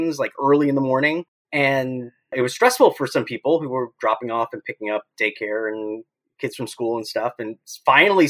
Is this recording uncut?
no; 2 cuts; at 1.4 s, 2.3 s

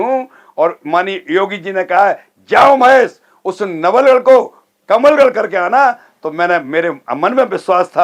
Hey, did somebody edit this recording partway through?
no; 0 cuts

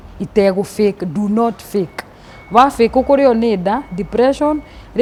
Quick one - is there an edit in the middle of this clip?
no; 0 cuts

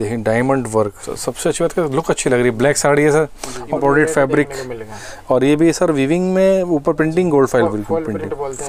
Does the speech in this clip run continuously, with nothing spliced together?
no; 2 cuts; at 1.1 s, 3.8 s

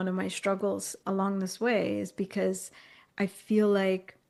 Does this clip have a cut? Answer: no; 0 cuts

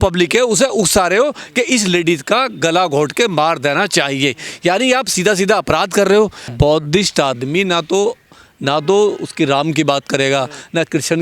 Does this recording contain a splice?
yes; 1 cut; at 6.4 s

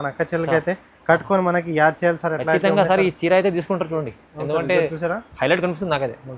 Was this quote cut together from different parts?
no; 0 cuts

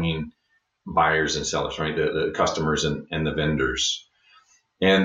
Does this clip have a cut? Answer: no; 0 cuts

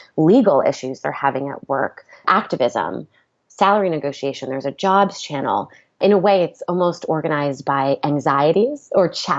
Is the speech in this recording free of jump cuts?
no; 2 cuts; at 2.2 s, 5.8 s

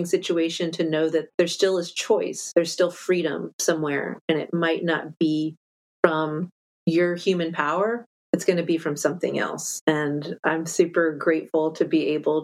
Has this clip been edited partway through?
yes; 2 cuts; at 1.3 s, 2.4 s

